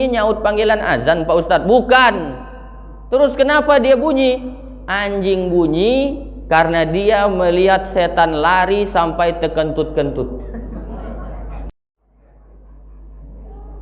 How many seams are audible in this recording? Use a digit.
1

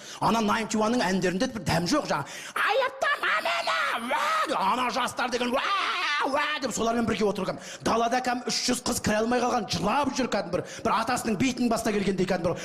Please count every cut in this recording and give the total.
1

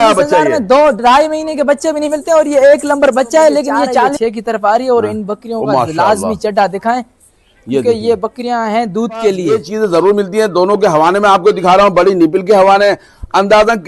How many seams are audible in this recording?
2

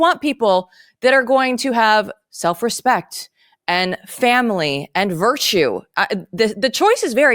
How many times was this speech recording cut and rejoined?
0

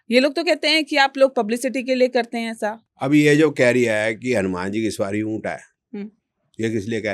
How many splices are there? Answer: 1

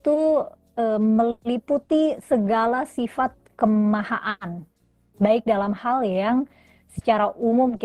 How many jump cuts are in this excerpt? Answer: 0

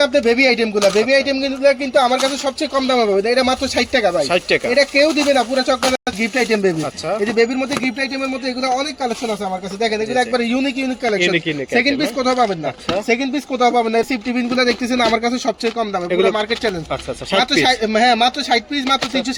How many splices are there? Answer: 0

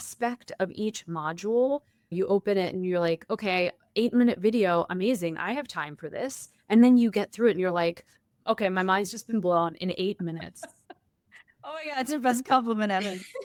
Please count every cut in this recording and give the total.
0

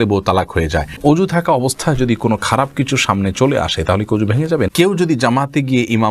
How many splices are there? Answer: 2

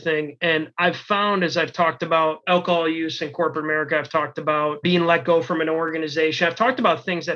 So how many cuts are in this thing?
2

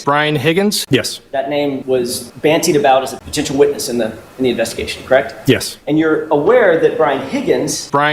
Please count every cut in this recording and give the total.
4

